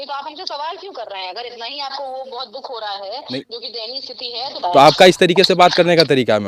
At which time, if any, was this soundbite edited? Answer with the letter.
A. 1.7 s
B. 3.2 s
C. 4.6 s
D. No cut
C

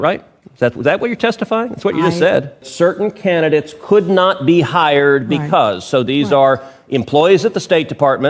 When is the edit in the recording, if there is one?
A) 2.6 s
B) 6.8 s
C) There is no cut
A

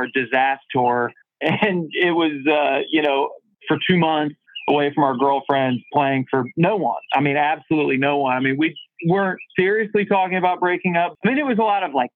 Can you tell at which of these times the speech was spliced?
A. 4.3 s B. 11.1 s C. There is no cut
B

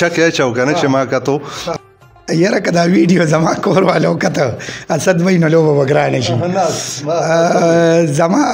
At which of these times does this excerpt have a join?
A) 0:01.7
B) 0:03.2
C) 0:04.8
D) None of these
A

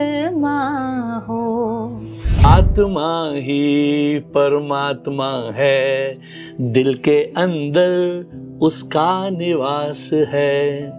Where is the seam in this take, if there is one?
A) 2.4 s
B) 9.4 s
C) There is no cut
A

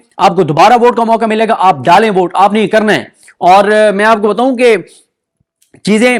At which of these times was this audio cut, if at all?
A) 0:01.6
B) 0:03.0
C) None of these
C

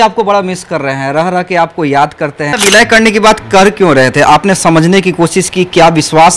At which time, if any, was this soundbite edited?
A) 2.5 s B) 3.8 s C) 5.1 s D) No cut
A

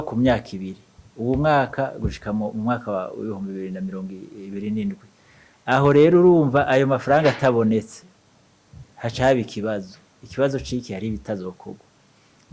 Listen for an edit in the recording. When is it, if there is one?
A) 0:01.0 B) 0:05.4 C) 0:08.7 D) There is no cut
D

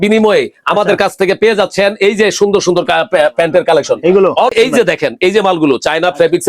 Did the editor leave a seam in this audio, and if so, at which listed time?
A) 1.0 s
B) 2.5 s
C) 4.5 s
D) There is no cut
C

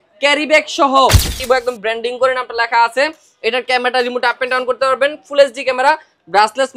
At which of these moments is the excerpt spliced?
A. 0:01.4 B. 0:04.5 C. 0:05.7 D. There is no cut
A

